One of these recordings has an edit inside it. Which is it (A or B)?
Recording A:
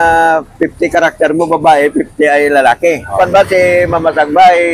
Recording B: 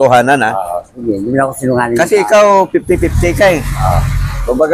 A